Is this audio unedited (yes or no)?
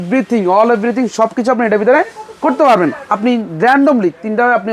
no